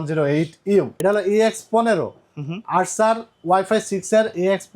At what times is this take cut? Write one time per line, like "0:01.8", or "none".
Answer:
0:00.9

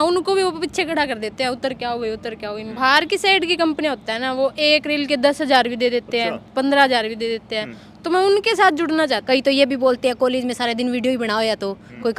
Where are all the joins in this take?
0:02.7
0:09.2

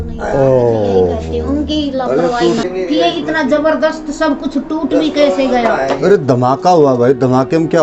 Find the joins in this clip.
0:02.6

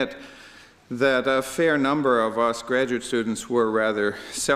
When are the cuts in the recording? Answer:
0:01.8

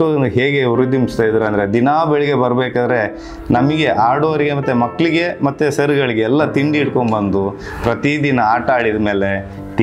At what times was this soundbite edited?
none

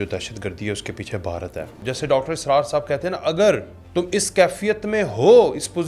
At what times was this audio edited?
0:01.8
0:03.8

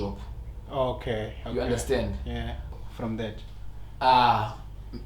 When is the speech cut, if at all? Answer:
0:02.8

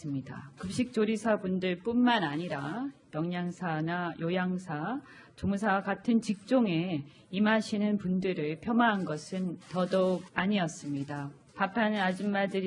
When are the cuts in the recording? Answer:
0:03.9

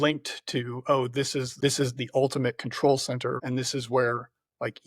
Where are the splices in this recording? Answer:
0:03.4

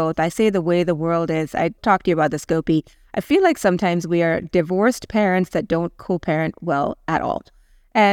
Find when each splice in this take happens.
none

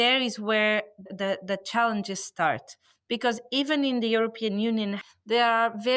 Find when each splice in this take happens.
0:05.0

